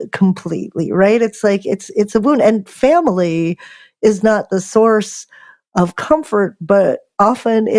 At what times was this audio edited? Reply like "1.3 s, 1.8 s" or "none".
none